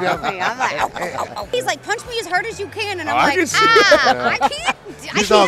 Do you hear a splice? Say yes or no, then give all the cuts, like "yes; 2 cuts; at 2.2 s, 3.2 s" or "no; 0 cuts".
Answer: yes; 1 cut; at 1.5 s